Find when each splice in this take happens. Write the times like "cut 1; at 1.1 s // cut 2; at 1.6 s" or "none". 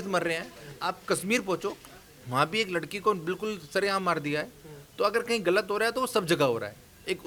none